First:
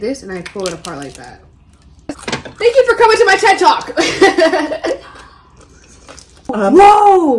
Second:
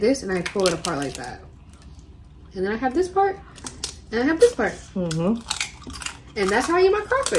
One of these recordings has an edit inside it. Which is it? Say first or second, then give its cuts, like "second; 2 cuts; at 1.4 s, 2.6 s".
first; 2 cuts; at 2.0 s, 6.5 s